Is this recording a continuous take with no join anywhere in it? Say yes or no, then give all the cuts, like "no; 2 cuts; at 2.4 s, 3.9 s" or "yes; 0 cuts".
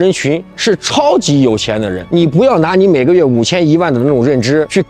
no; 1 cut; at 2.0 s